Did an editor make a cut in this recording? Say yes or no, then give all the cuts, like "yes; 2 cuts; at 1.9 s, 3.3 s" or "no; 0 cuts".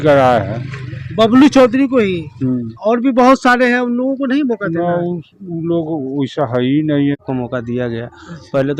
yes; 1 cut; at 7.2 s